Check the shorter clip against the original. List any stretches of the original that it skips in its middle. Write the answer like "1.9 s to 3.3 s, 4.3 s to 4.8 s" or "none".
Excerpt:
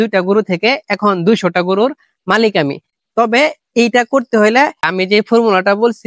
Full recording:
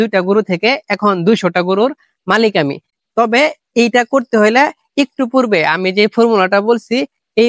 4.9 s to 5.7 s